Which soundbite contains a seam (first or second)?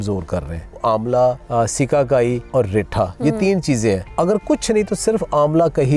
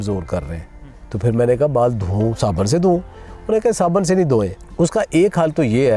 first